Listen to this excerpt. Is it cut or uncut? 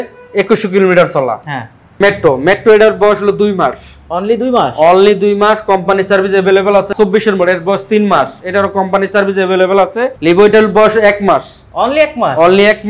cut